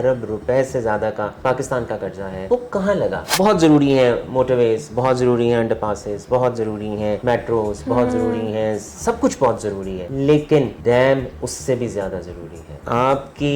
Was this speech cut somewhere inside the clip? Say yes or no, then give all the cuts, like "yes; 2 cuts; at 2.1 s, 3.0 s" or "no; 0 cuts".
yes; 7 cuts; at 1.3 s, 2.4 s, 3.2 s, 7.2 s, 10.0 s, 10.7 s, 12.8 s